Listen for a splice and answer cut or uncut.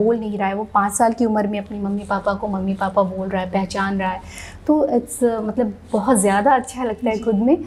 uncut